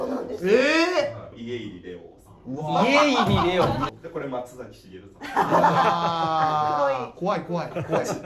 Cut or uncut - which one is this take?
cut